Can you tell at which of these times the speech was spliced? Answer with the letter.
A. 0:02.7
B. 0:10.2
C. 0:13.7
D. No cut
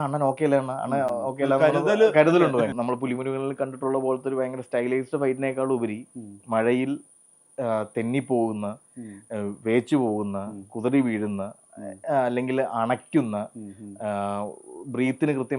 A